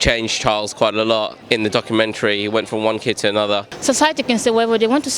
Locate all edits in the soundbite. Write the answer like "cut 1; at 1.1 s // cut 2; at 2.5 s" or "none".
cut 1; at 1.4 s // cut 2; at 3.7 s